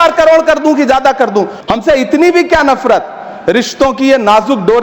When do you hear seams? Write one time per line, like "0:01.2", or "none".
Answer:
0:01.6